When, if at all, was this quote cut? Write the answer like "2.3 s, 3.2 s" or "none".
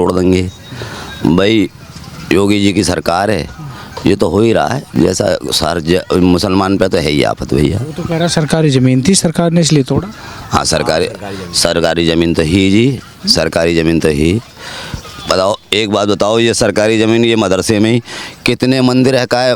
none